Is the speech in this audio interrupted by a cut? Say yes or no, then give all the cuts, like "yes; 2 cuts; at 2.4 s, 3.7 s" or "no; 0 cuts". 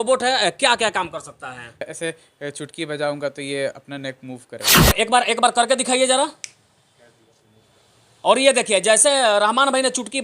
yes; 2 cuts; at 1.9 s, 4.9 s